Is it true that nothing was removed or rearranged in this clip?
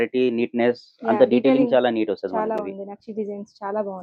yes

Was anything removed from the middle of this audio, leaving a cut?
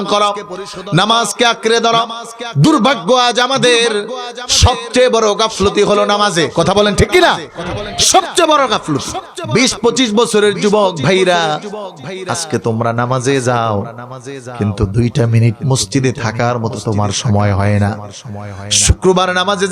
yes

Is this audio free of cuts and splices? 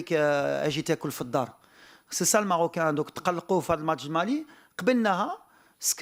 yes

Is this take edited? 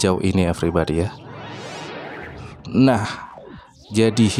no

